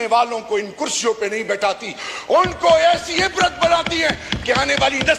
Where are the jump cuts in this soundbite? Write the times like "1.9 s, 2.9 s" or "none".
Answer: none